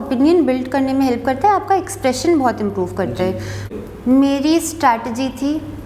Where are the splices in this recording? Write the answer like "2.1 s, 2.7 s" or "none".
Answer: 3.7 s